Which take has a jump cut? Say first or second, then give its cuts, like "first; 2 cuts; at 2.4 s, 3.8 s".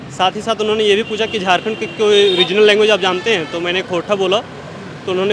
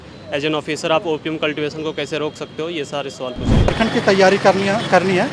second; 1 cut; at 3.7 s